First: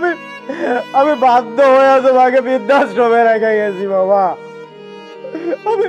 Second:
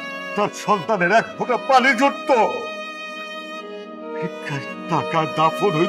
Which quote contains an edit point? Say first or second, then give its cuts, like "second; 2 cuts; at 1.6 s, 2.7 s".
second; 2 cuts; at 2.6 s, 4.9 s